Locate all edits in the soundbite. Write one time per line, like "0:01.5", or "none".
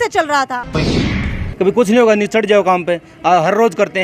0:01.0